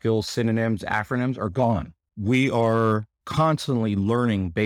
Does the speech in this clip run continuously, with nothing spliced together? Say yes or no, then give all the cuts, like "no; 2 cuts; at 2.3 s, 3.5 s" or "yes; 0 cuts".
no; 1 cut; at 2.0 s